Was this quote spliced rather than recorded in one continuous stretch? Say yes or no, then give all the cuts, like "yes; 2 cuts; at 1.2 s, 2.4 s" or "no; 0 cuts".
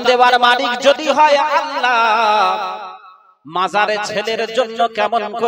no; 0 cuts